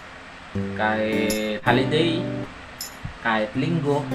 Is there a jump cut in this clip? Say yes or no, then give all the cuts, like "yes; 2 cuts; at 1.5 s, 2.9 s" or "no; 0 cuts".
yes; 1 cut; at 1.6 s